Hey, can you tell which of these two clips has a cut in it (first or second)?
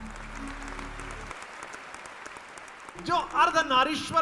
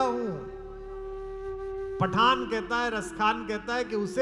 first